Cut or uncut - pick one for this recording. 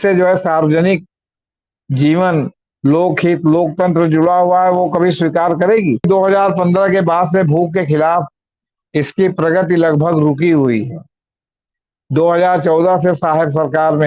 cut